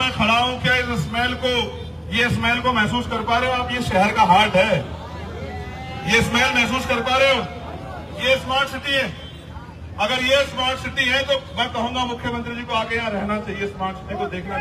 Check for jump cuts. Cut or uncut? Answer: uncut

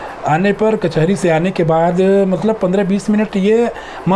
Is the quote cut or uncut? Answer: uncut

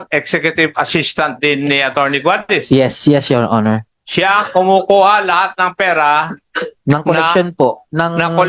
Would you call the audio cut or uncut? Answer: uncut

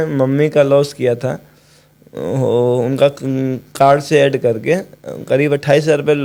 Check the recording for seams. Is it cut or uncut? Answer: uncut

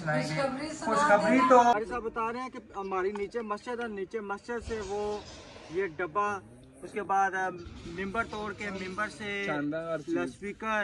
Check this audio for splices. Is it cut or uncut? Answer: cut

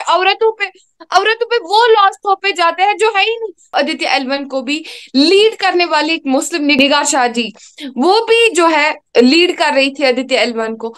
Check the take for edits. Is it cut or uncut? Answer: cut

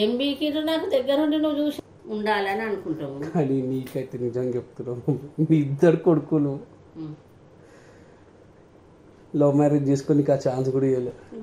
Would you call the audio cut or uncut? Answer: cut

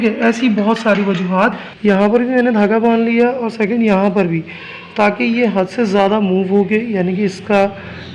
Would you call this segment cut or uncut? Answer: cut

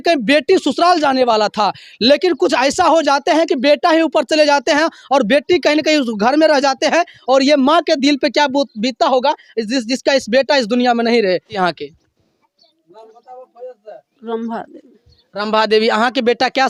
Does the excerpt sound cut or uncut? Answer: uncut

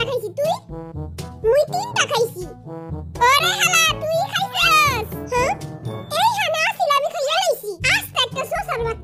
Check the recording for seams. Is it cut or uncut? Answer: uncut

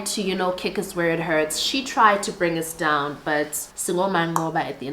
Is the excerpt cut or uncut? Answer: cut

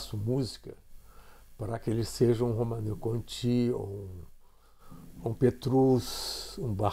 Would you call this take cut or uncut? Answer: uncut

